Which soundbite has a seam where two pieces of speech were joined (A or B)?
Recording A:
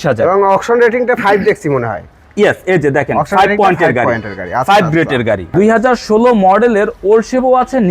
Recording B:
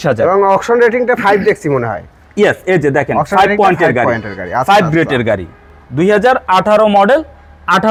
A